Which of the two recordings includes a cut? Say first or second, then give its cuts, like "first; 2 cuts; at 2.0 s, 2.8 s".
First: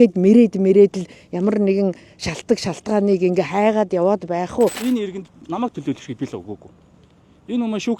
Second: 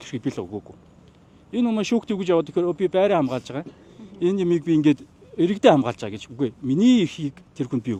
first; 1 cut; at 4.8 s